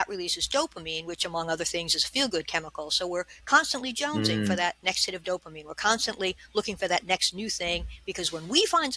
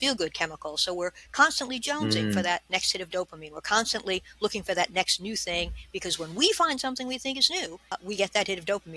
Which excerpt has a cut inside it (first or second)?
second